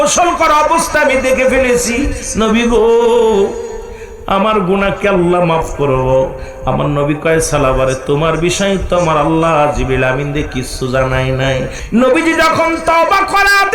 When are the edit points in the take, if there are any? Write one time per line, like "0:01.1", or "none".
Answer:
0:11.8